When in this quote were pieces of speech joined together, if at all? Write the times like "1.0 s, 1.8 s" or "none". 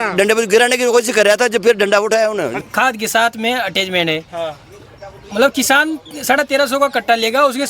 2.5 s